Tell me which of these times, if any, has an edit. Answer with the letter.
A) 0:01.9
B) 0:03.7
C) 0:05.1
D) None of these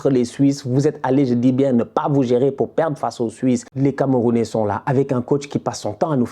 B